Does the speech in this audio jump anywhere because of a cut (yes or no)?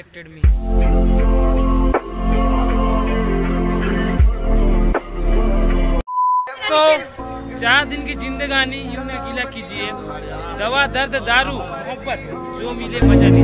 no